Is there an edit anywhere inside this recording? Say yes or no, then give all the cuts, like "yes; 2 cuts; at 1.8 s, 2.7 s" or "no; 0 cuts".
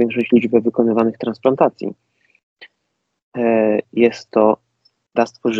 no; 0 cuts